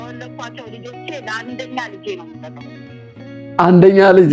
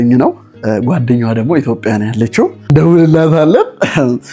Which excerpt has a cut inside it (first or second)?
second